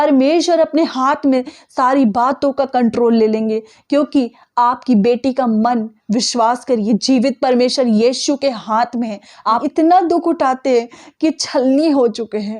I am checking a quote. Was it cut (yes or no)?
yes